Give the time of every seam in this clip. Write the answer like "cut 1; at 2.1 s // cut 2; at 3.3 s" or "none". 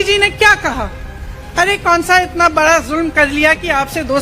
none